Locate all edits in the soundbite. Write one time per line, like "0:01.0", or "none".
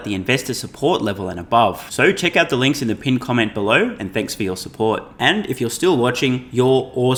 none